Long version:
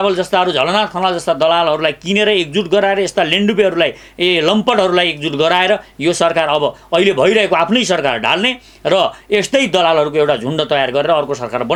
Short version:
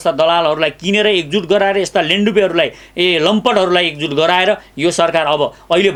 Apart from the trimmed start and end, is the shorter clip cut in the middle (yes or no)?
no